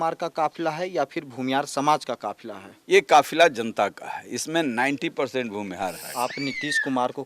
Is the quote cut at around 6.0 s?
yes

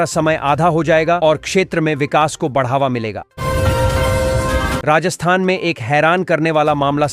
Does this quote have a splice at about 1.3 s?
no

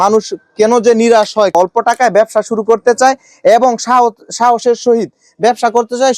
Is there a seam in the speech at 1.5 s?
yes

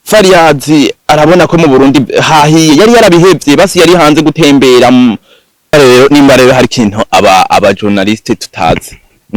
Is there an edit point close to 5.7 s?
yes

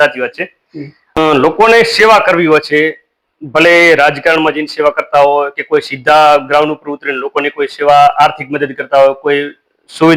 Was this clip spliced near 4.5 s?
no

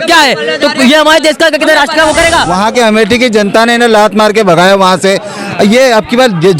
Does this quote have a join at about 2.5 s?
yes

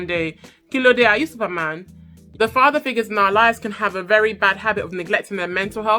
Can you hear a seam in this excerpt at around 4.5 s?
no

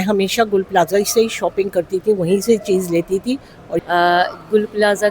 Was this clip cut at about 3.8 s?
yes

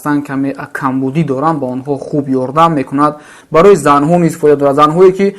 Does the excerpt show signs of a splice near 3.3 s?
yes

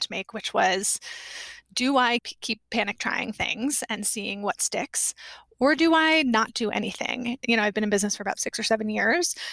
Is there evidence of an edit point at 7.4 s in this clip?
yes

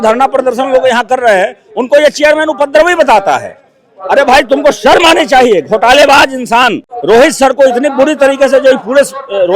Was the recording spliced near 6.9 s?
yes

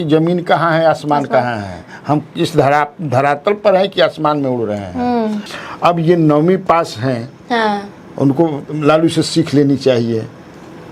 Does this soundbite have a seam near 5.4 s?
yes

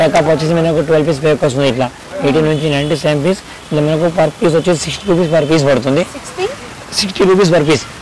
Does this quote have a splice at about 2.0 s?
no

